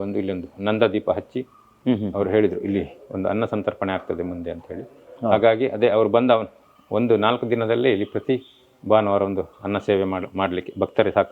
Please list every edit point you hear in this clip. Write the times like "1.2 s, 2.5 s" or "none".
none